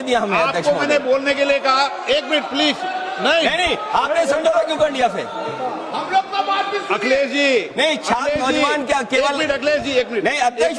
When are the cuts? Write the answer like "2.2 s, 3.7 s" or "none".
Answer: none